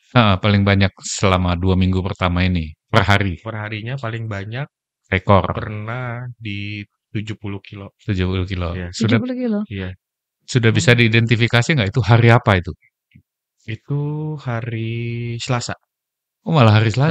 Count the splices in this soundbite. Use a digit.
1